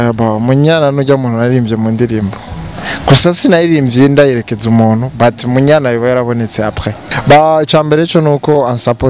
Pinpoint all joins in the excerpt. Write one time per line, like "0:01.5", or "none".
0:07.1